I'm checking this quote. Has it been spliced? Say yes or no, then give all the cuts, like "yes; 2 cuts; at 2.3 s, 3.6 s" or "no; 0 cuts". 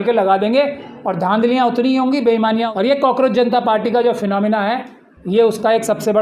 yes; 1 cut; at 2.7 s